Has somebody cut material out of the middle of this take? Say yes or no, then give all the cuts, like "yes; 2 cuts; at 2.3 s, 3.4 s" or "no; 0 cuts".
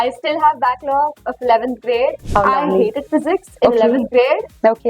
yes; 1 cut; at 2.2 s